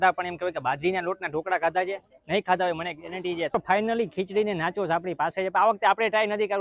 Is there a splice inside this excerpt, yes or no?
yes